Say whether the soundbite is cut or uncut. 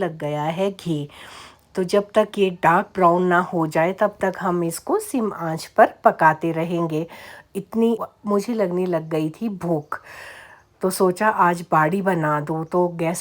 cut